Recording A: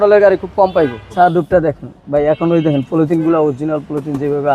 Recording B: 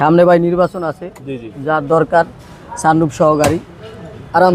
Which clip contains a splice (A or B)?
A